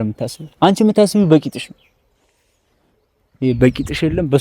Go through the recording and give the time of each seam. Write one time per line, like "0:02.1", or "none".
none